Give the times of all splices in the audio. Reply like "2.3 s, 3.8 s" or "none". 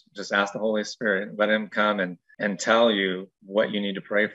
2.2 s, 3.3 s